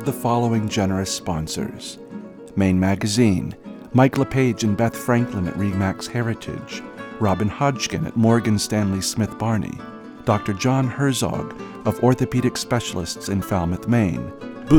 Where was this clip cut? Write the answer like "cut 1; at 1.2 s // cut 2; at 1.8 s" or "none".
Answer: none